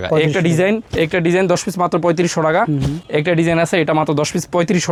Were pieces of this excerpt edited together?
no; 0 cuts

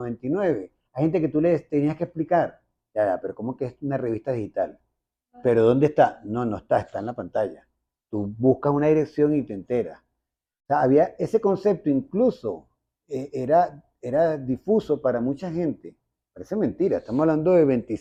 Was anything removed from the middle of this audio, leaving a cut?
no; 0 cuts

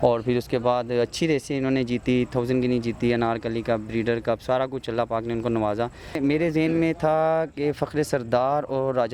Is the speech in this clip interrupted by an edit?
yes; 1 cut; at 6.2 s

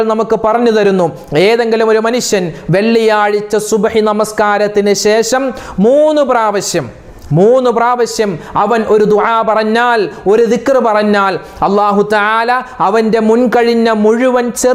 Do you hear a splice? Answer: no; 0 cuts

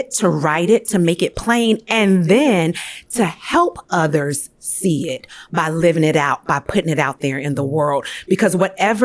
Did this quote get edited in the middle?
no; 0 cuts

